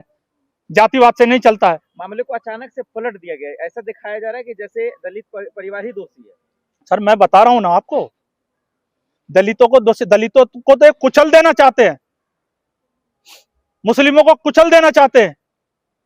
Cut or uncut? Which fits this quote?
uncut